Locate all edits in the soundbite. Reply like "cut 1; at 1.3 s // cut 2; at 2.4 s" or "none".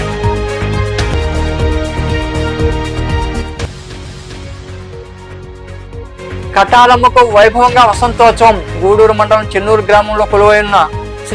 cut 1; at 1.1 s